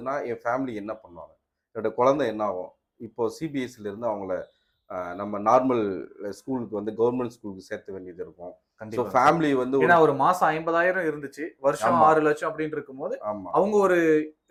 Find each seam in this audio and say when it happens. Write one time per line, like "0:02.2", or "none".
none